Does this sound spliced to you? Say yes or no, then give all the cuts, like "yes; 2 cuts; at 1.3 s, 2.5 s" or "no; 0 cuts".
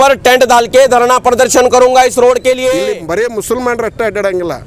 yes; 1 cut; at 2.8 s